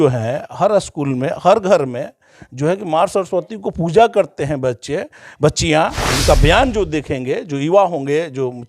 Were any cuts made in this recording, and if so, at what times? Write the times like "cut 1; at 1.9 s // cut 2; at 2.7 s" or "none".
cut 1; at 6.1 s